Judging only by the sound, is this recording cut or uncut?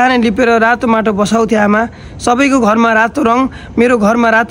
uncut